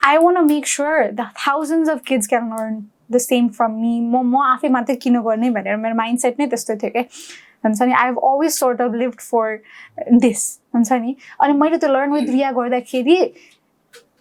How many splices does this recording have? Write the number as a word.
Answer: zero